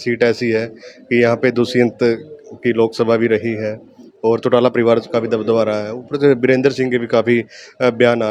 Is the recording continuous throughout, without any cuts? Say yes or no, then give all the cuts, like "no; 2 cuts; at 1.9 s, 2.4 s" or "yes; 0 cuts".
yes; 0 cuts